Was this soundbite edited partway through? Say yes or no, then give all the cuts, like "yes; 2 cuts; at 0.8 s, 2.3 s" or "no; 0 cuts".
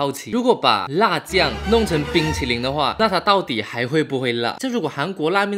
yes; 1 cut; at 4.6 s